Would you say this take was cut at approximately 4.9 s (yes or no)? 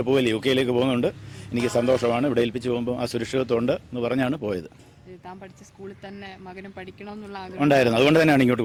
no